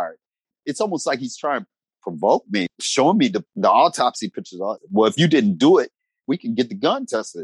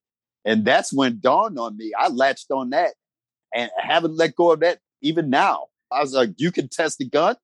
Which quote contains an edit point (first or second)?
first